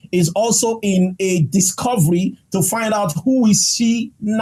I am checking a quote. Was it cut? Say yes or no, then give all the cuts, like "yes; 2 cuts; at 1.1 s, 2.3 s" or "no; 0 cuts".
no; 0 cuts